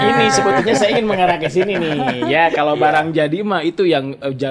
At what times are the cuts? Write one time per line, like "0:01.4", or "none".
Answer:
none